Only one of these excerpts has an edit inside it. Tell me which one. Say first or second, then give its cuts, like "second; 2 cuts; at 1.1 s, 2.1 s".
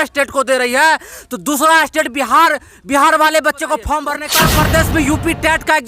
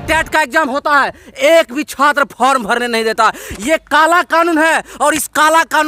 first; 1 cut; at 4.2 s